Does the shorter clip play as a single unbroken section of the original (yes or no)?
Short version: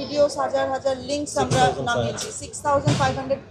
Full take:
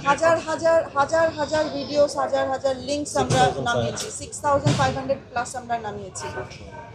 yes